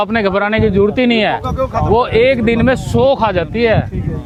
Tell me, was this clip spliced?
no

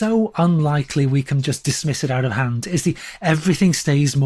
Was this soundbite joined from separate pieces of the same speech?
no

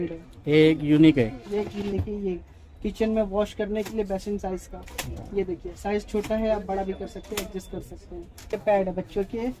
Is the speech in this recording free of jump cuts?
no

